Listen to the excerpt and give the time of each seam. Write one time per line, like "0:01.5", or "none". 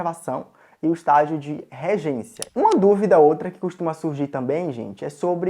0:02.4